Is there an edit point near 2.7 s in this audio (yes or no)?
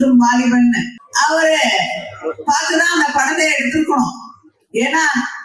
no